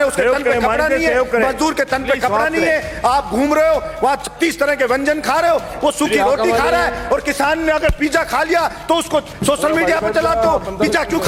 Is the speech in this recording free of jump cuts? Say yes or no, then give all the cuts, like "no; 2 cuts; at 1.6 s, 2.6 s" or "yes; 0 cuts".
yes; 0 cuts